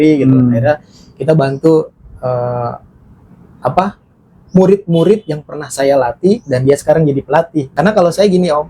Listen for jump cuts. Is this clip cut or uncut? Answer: cut